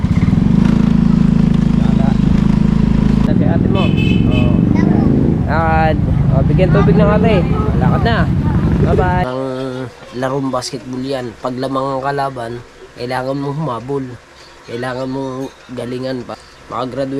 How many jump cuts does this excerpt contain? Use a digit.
3